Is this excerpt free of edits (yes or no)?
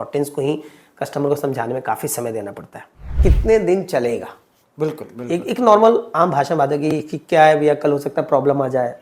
no